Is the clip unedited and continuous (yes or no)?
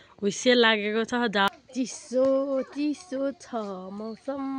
no